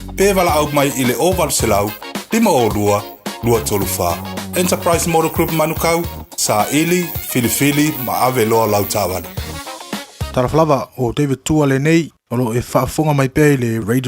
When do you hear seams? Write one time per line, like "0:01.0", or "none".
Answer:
0:10.2